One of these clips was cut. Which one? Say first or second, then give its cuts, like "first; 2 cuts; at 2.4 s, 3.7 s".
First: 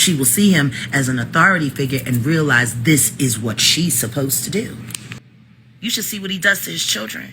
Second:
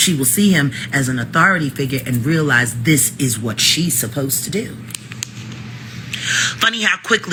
first; 1 cut; at 5.3 s